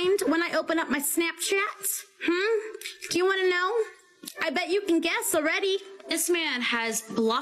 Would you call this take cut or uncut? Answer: uncut